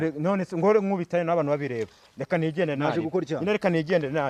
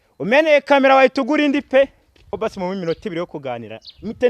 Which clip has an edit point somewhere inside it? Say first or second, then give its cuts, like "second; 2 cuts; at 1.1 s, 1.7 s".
second; 1 cut; at 2.3 s